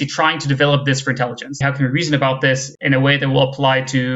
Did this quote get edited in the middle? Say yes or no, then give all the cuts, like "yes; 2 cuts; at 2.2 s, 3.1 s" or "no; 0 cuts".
yes; 1 cut; at 1.6 s